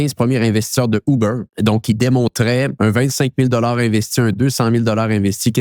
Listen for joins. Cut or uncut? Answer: cut